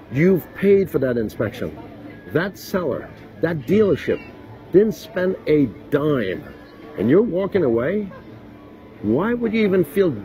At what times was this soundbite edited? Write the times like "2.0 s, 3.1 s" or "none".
none